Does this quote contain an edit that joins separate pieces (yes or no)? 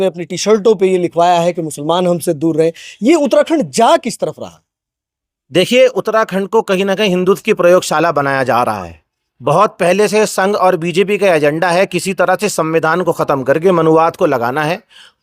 no